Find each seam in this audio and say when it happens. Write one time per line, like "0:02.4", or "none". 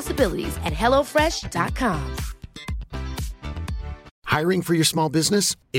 0:04.1